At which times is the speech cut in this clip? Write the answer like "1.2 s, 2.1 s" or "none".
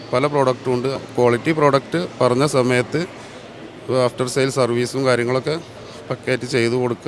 1.0 s